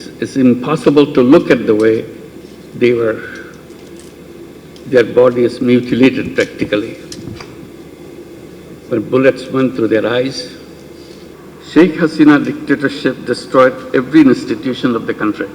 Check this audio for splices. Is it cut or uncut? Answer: cut